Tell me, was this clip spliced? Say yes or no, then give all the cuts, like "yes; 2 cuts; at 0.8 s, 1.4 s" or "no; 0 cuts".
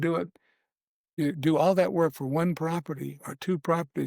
yes; 1 cut; at 1.1 s